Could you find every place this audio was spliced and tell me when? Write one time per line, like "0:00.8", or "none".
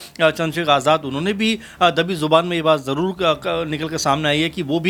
none